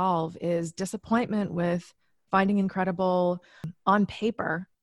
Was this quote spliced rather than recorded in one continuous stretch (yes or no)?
yes